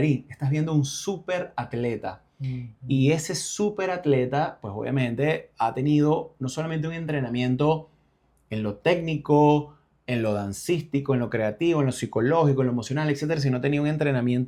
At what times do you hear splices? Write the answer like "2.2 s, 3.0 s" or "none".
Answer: none